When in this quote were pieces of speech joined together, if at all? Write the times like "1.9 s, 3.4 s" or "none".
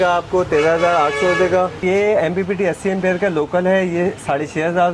1.8 s